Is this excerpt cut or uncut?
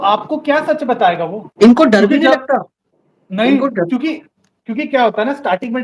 cut